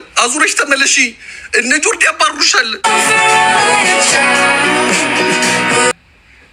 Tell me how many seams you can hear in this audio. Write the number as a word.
zero